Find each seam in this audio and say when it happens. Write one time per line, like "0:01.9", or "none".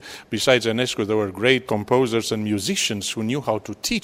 0:01.6